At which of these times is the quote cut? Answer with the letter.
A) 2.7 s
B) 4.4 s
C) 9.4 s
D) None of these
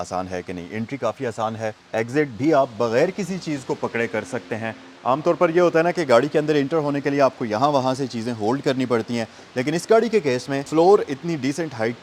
D